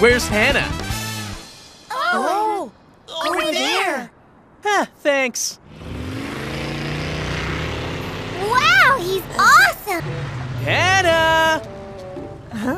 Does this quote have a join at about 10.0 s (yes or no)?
yes